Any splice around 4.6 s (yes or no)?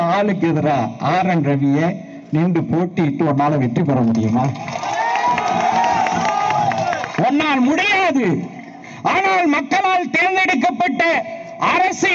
no